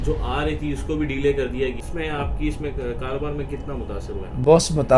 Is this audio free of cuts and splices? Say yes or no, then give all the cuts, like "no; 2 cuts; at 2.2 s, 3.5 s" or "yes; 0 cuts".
no; 1 cut; at 1.8 s